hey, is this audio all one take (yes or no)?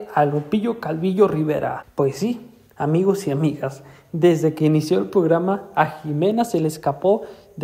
no